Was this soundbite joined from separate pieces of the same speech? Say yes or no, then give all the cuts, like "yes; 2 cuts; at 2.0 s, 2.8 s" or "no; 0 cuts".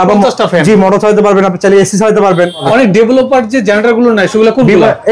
yes; 1 cut; at 2.7 s